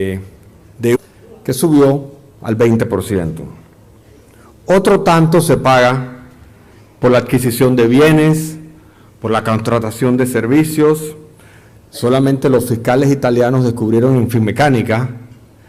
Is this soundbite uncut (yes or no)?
yes